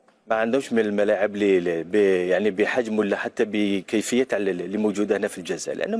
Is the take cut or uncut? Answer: uncut